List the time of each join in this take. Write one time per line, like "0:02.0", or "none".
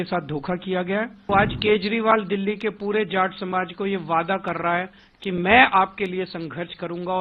0:01.2